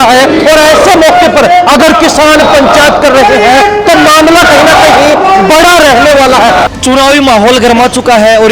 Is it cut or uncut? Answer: cut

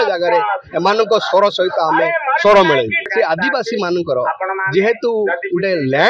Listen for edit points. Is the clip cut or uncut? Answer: cut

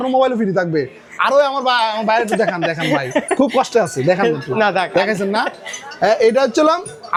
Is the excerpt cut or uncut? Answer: uncut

